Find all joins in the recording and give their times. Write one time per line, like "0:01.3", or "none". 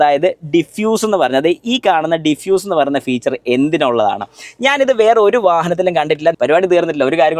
0:06.4